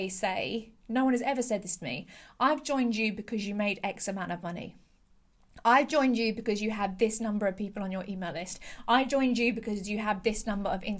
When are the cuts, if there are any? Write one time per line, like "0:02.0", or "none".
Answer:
none